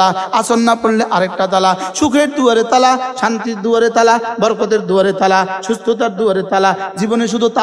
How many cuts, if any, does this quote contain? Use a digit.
0